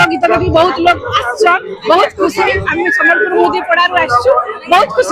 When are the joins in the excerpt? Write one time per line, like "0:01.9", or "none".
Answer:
none